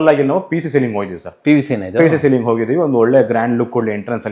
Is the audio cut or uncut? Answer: uncut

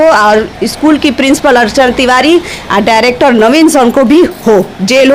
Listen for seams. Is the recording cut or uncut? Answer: uncut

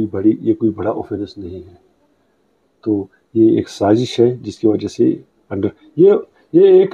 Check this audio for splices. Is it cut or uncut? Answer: uncut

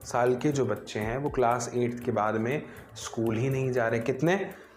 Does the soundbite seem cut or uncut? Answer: uncut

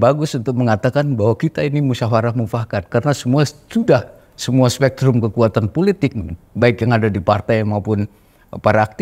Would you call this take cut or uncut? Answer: uncut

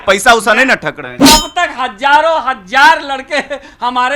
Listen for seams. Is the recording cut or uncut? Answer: cut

